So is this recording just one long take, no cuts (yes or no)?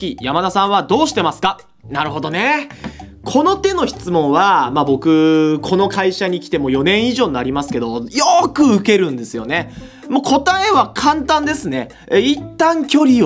yes